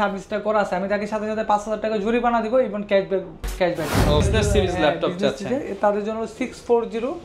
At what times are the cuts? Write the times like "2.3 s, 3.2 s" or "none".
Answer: 4.2 s